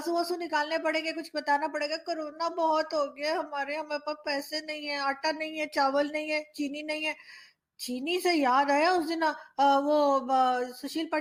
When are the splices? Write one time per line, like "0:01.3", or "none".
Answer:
none